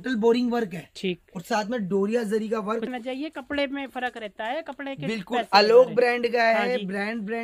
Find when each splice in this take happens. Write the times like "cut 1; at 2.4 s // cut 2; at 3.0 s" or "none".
cut 1; at 2.9 s